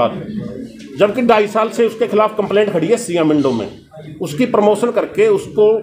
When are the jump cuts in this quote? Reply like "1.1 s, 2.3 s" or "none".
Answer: none